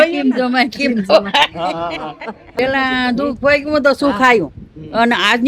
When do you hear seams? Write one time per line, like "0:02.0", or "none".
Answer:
0:02.6